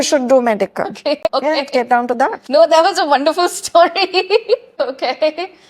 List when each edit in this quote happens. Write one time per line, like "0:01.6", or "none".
none